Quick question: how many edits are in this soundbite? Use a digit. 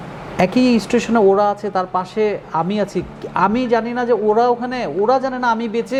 0